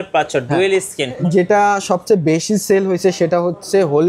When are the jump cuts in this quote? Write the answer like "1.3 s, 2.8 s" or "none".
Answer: 1.2 s